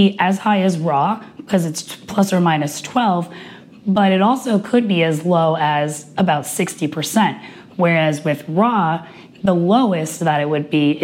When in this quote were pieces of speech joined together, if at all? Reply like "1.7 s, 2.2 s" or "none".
none

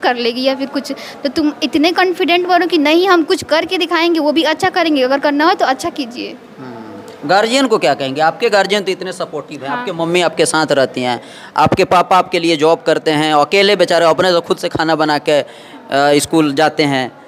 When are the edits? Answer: none

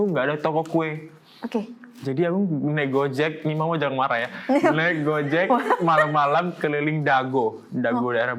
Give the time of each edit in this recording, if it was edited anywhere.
none

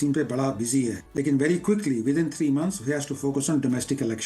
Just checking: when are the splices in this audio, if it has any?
1.0 s

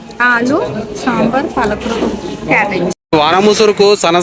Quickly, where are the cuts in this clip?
2.9 s

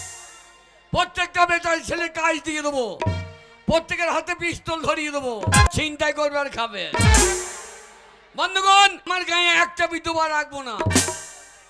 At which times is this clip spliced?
5.7 s, 9.1 s

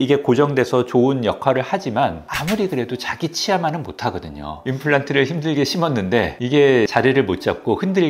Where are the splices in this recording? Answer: 4.5 s

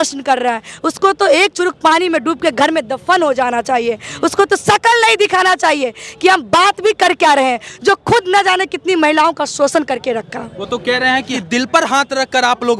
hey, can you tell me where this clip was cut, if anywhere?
none

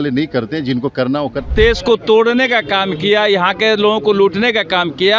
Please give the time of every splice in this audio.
1.5 s

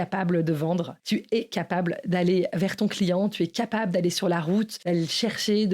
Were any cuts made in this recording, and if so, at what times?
0.9 s, 4.8 s

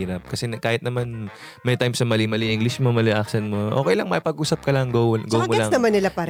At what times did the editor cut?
none

